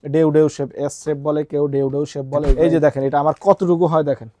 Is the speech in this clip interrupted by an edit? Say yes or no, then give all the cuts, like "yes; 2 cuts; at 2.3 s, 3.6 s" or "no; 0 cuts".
yes; 1 cut; at 2.5 s